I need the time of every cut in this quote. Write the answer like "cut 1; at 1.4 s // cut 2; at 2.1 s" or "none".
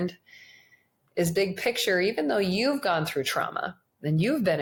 none